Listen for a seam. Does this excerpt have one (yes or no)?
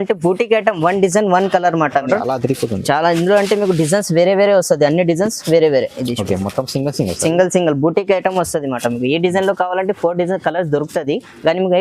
yes